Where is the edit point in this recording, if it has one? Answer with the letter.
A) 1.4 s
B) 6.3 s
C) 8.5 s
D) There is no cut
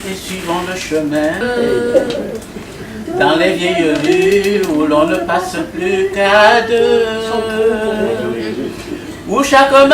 A